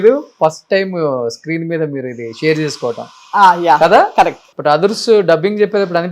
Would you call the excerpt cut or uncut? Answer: cut